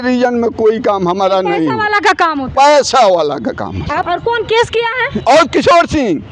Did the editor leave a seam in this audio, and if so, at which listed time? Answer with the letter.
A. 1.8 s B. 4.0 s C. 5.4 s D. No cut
B